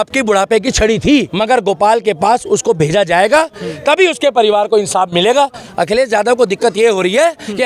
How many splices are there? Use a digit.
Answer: 2